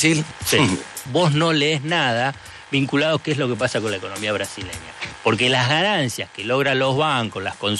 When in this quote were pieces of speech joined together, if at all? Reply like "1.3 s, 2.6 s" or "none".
1.1 s

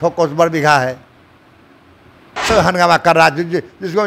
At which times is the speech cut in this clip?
2.3 s

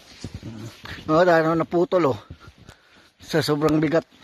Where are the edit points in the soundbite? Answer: none

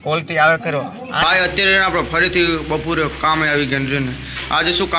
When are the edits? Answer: 1.2 s

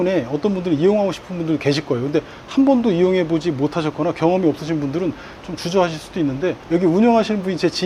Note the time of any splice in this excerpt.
none

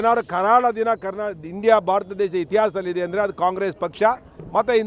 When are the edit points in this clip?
none

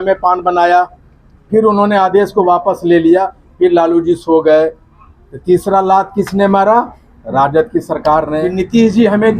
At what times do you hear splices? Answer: 8.4 s

